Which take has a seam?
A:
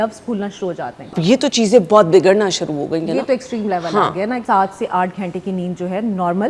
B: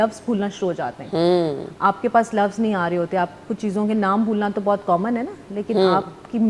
A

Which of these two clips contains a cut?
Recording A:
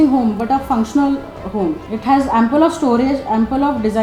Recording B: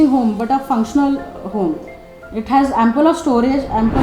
A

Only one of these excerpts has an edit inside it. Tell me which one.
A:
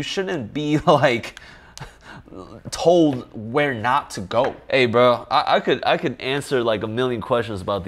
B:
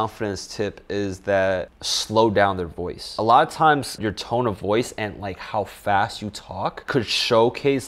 B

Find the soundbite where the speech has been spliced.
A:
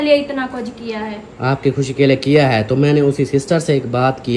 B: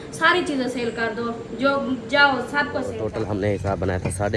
B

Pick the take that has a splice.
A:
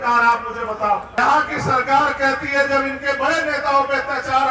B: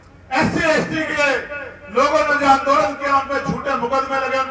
A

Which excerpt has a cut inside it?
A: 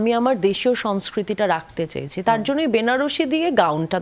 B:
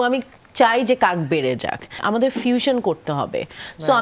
B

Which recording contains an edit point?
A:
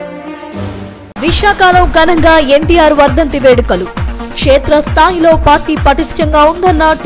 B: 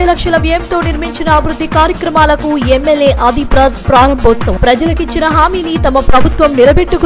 A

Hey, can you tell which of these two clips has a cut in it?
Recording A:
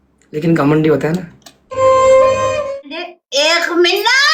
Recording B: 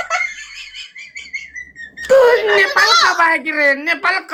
A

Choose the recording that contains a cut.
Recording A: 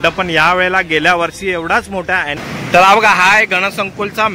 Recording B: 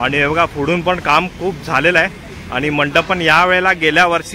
A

